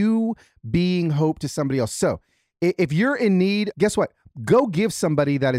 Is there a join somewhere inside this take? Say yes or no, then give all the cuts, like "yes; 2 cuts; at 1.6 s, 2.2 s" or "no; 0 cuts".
yes; 1 cut; at 3.7 s